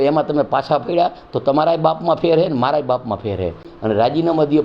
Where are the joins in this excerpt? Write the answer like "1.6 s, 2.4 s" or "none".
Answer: 3.7 s